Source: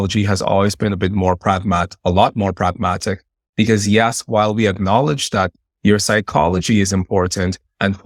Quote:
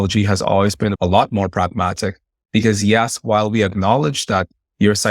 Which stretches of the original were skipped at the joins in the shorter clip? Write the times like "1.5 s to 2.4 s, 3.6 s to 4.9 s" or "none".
0.9 s to 2.0 s